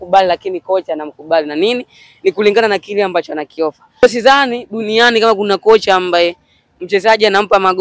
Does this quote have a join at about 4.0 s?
yes; 1 cut; at 4.0 s

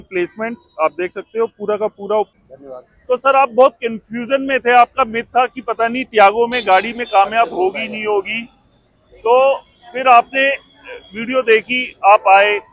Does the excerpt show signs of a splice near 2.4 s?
yes; 1 cut; at 2.4 s

